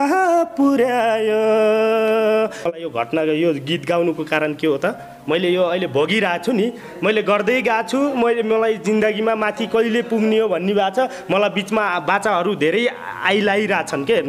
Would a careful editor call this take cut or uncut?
cut